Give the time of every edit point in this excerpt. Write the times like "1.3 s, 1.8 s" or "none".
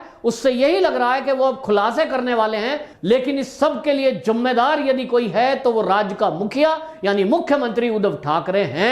2.9 s